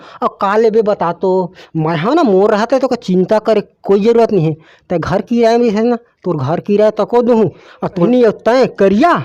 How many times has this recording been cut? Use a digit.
1